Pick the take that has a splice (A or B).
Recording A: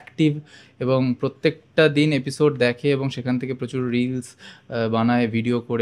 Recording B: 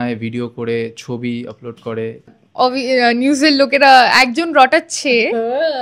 B